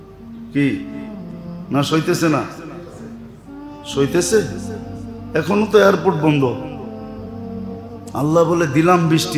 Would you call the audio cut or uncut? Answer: cut